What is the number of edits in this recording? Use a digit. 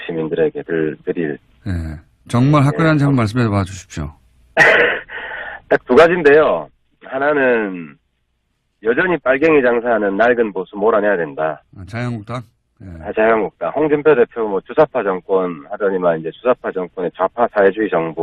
1